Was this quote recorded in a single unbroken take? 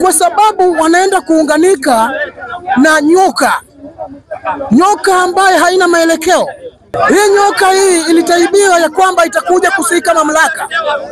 no; 1 cut; at 6.9 s

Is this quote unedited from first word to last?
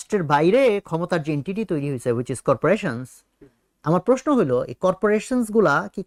yes; 0 cuts

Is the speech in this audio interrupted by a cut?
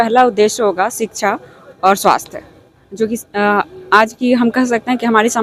no; 0 cuts

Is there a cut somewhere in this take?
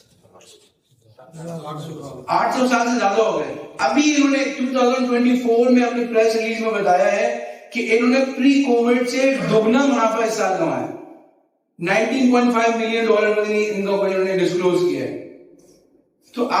no; 0 cuts

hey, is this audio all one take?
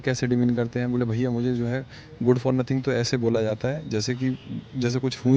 yes; 0 cuts

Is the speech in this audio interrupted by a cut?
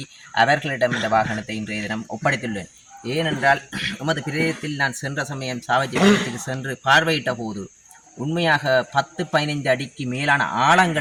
no; 0 cuts

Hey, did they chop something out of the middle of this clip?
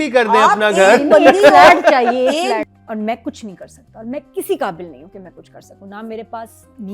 yes; 1 cut; at 2.6 s

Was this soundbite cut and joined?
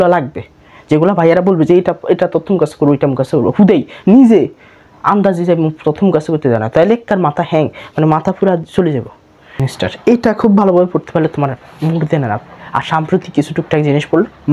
yes; 1 cut; at 9.6 s

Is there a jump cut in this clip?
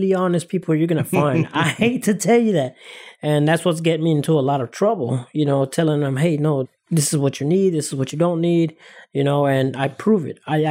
no; 0 cuts

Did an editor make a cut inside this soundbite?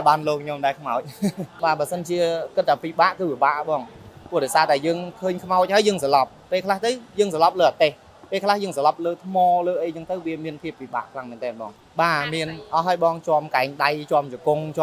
yes; 2 cuts; at 1.5 s, 11.8 s

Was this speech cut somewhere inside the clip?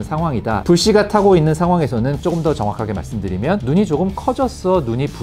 yes; 1 cut; at 2.2 s

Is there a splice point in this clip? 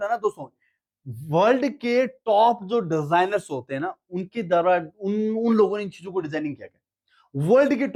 no; 0 cuts

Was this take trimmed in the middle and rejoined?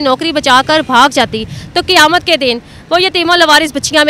no; 0 cuts

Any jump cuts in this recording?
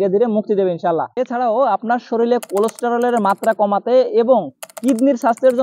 yes; 1 cut; at 1.1 s

